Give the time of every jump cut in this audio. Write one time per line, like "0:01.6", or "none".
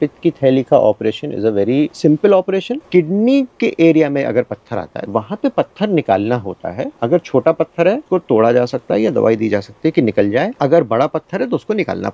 0:01.9
0:02.8
0:05.0
0:06.9
0:08.0
0:10.5